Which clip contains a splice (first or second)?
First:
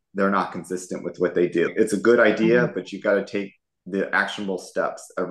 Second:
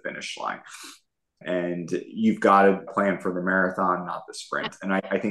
second